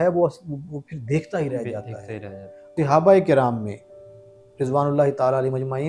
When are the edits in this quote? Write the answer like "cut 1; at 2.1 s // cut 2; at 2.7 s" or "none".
cut 1; at 2.7 s